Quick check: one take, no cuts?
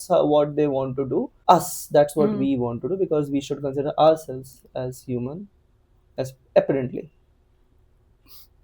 no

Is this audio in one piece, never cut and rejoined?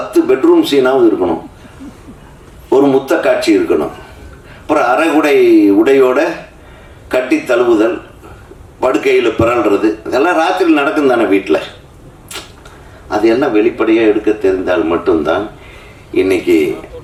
yes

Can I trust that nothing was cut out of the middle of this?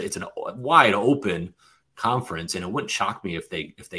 yes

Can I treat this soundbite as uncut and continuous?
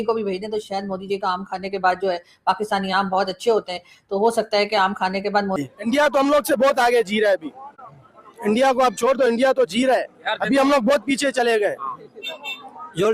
no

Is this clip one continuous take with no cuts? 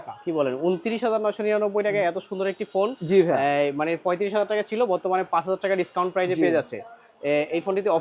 yes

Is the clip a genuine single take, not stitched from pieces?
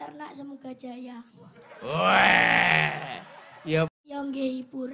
no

